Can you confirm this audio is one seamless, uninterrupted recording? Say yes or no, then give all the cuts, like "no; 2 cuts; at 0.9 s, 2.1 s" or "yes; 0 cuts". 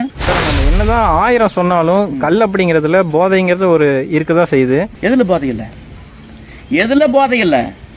no; 1 cut; at 4.9 s